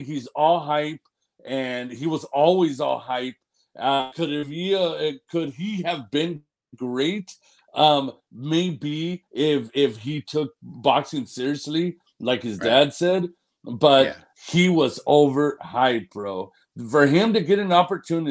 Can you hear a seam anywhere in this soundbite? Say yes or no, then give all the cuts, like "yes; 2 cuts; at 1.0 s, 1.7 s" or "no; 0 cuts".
no; 0 cuts